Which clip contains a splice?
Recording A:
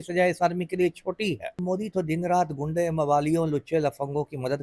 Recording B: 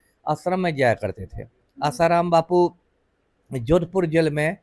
A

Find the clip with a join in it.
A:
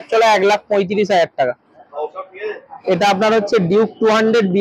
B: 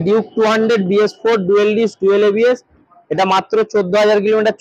A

